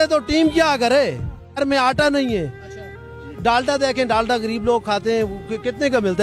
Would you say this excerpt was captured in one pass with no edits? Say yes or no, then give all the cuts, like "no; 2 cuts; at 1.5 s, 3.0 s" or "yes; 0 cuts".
no; 1 cut; at 1.6 s